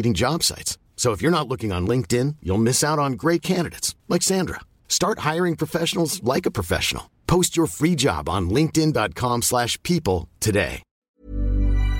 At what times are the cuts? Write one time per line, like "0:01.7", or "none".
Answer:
0:10.9